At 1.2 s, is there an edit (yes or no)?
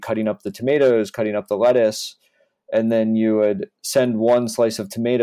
no